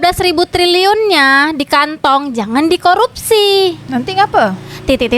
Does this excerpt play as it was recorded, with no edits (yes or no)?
yes